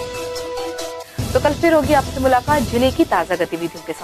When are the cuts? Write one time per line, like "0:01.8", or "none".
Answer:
none